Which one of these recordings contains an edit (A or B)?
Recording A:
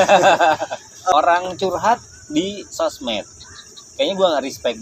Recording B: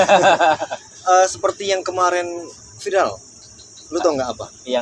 A